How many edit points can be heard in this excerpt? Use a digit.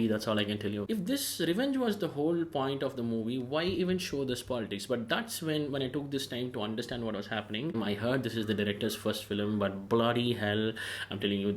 2